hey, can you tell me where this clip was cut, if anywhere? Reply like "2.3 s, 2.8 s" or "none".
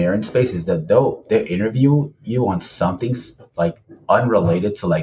none